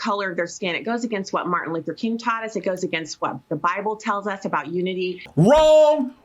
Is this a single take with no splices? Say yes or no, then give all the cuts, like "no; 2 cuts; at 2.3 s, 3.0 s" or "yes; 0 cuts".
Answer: no; 1 cut; at 5.2 s